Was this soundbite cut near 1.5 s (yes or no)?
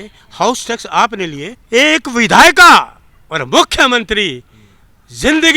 yes